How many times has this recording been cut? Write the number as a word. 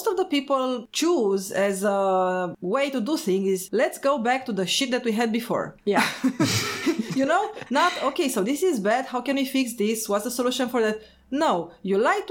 zero